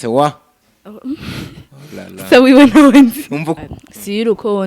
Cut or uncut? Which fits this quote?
cut